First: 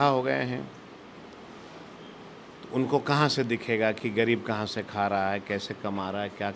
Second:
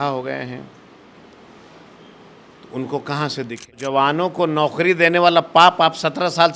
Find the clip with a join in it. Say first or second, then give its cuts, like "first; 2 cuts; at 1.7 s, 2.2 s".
second; 1 cut; at 3.8 s